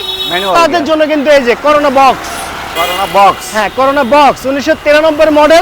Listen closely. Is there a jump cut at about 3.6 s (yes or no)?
no